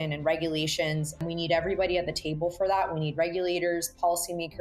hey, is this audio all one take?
no; 1 cut; at 1.2 s

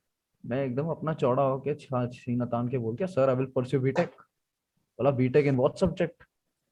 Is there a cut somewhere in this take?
no; 0 cuts

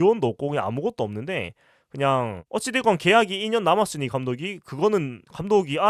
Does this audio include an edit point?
no; 0 cuts

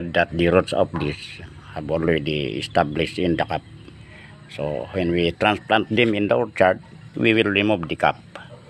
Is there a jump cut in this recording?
no; 0 cuts

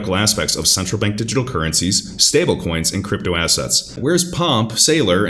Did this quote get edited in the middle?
yes; 1 cut; at 3.9 s

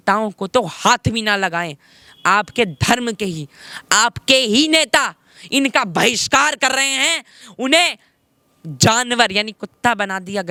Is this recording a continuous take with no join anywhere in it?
yes; 0 cuts

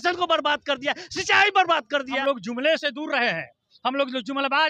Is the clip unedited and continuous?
no; 1 cut; at 2.2 s

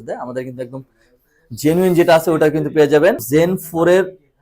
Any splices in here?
yes; 1 cut; at 3.2 s

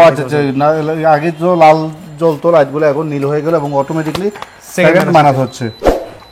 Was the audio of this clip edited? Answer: no; 0 cuts

